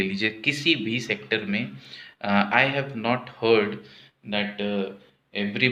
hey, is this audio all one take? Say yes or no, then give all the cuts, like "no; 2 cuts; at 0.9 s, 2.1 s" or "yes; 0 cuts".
yes; 0 cuts